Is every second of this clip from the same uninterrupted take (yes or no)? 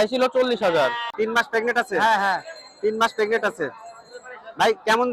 no